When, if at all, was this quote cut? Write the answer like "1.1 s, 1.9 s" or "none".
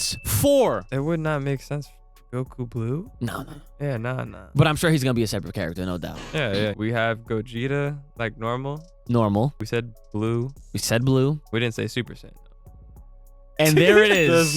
0.9 s, 6.8 s, 9.6 s, 11.4 s